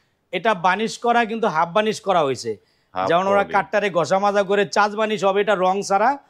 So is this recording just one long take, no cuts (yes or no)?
yes